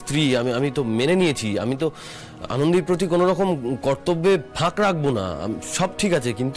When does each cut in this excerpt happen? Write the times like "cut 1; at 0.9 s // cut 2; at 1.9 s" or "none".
none

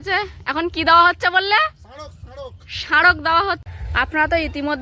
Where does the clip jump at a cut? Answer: cut 1; at 3.6 s

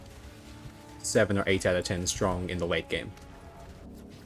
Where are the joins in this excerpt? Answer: none

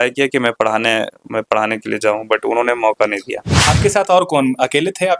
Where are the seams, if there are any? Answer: cut 1; at 3.5 s

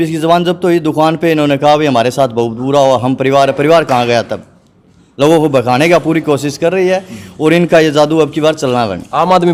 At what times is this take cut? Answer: none

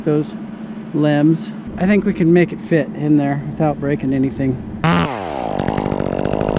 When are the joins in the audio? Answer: cut 1; at 1.7 s // cut 2; at 4.9 s

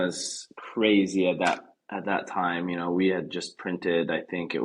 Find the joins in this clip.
none

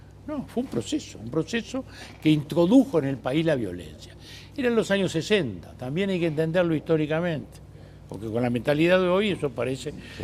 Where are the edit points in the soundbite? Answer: cut 1; at 9.2 s

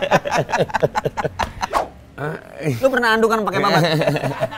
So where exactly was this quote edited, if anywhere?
cut 1; at 1.7 s

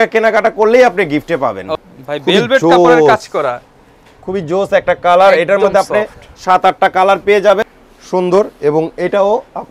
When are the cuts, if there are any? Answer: cut 1; at 1.6 s // cut 2; at 7.8 s

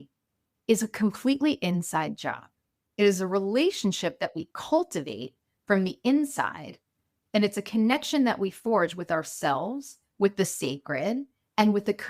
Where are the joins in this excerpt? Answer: none

